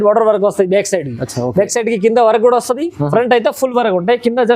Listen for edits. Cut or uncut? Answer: uncut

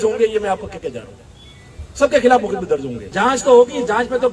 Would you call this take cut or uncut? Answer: cut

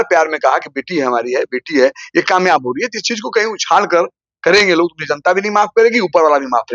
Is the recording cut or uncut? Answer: uncut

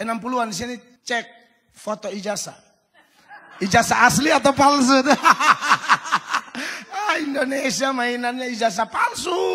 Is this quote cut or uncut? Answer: cut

